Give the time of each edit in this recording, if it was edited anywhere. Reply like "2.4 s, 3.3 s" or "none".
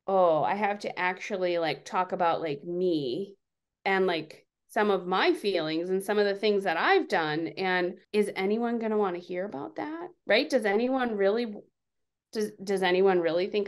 none